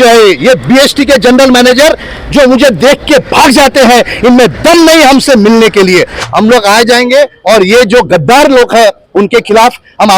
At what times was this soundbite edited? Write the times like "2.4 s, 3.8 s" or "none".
6.2 s